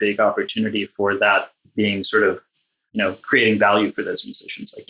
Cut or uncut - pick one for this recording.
uncut